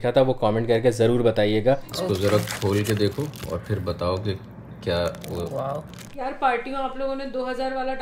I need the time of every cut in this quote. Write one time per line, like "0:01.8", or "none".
0:01.9
0:06.2